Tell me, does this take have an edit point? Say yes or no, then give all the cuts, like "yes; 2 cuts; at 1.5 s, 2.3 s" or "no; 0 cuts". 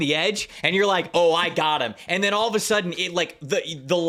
no; 0 cuts